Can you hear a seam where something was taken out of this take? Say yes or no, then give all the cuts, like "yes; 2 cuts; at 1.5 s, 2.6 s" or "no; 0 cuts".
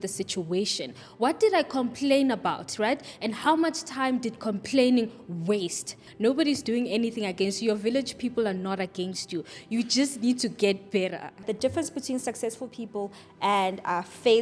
yes; 2 cuts; at 6.0 s, 11.4 s